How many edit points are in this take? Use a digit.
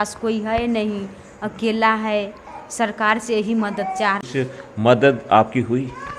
1